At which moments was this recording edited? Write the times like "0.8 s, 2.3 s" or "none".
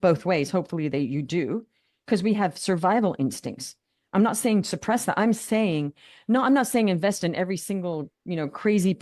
none